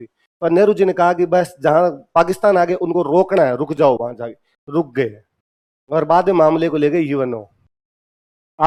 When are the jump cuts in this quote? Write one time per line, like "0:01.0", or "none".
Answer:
none